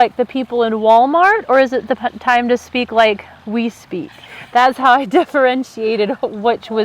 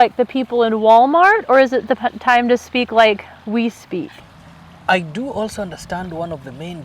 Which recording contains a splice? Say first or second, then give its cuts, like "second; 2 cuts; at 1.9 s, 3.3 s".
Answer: second; 1 cut; at 4.3 s